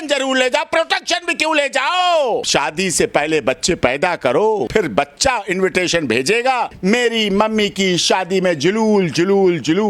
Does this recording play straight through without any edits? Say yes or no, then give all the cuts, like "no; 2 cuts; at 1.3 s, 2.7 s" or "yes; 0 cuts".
no; 3 cuts; at 2.5 s, 4.7 s, 6.7 s